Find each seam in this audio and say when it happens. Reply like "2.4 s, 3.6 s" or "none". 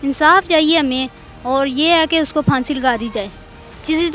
none